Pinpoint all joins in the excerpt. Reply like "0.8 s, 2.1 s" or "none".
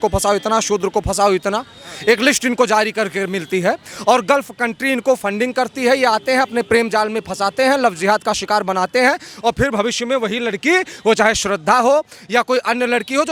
none